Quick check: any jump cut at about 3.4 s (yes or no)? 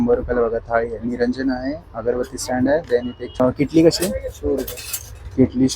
yes